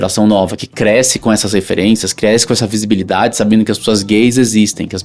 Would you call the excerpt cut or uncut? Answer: uncut